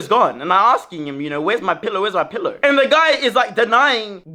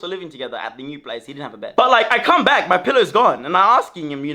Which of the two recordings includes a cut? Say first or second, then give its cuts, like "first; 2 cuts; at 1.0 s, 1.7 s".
second; 1 cut; at 1.6 s